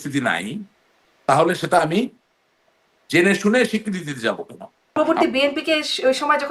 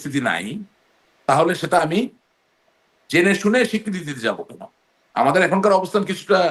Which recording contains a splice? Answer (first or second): first